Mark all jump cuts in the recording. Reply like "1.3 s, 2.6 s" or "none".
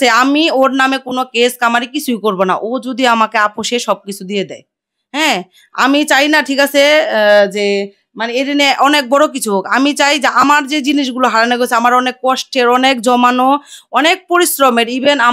none